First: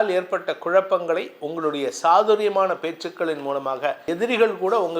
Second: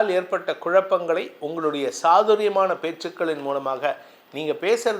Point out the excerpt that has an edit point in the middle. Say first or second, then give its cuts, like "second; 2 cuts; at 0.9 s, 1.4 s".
first; 1 cut; at 4.1 s